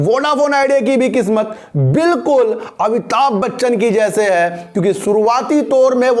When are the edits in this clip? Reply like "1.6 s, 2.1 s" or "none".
none